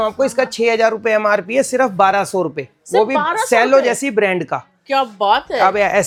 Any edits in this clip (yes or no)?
no